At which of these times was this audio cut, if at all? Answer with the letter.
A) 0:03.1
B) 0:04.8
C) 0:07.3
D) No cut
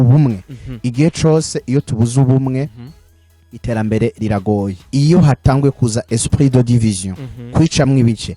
B